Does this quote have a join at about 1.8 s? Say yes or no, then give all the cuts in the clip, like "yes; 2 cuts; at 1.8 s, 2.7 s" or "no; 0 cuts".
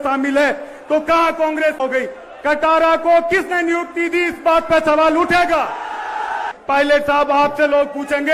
yes; 2 cuts; at 1.8 s, 6.5 s